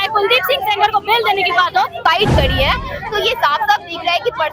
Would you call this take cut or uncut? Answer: cut